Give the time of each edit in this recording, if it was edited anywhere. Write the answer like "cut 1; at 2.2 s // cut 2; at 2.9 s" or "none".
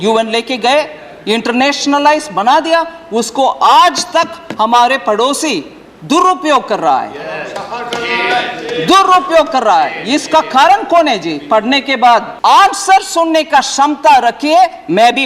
cut 1; at 12.3 s